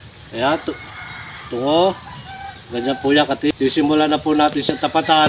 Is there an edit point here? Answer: yes; 1 cut; at 3.5 s

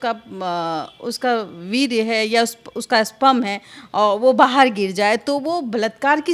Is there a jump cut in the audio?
no; 0 cuts

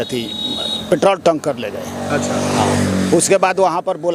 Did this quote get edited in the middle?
no; 0 cuts

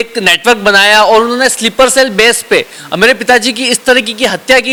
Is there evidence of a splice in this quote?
no; 0 cuts

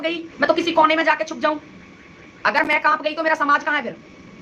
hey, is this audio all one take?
yes; 0 cuts

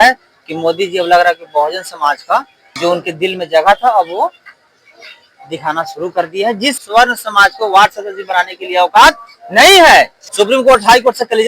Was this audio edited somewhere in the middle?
yes; 3 cuts; at 2.6 s, 6.8 s, 10.2 s

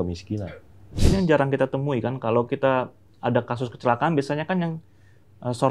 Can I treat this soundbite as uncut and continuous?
no; 1 cut; at 1.0 s

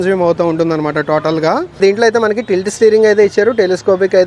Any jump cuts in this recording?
yes; 1 cut; at 1.7 s

